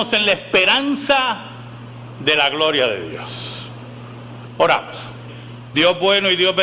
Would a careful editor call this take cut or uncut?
cut